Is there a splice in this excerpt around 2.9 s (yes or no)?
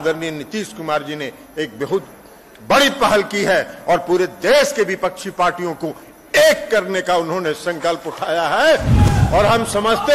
no